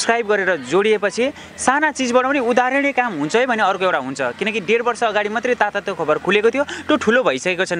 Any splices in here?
no; 0 cuts

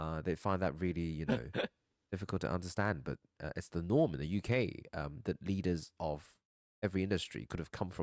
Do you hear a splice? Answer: no; 0 cuts

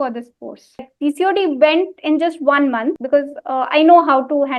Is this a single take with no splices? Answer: no; 2 cuts; at 0.9 s, 3.0 s

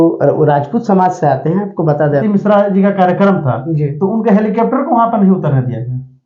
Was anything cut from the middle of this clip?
yes; 1 cut; at 2.2 s

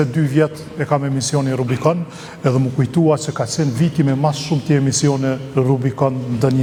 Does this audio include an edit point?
no; 0 cuts

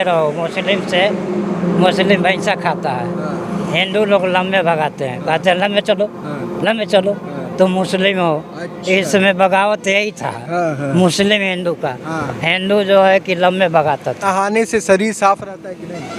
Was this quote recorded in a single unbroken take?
no; 1 cut; at 14.2 s

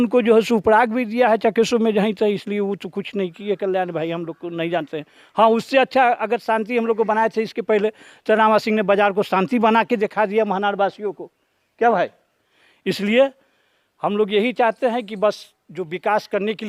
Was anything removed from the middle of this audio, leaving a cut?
no; 0 cuts

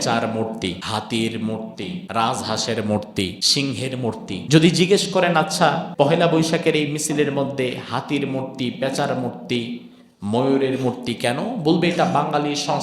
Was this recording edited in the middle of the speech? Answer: yes; 5 cuts; at 0.8 s, 2.0 s, 3.4 s, 4.4 s, 5.9 s

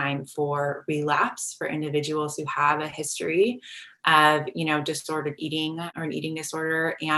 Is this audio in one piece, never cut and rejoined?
no; 1 cut; at 5.9 s

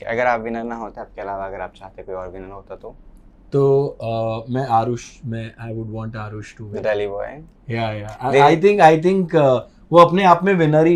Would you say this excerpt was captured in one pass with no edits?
yes; 0 cuts

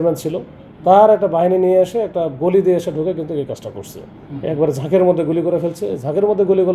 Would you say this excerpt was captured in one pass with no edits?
yes; 0 cuts

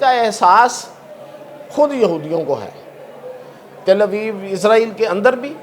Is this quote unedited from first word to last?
yes; 0 cuts

